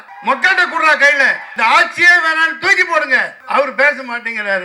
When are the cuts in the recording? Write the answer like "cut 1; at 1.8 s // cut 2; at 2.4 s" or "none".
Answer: cut 1; at 3.4 s

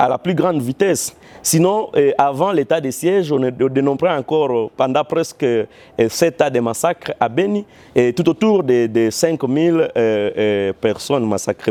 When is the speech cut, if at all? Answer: none

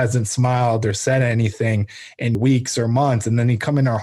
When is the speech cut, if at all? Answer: cut 1; at 2.3 s

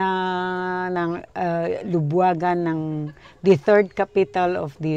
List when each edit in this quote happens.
none

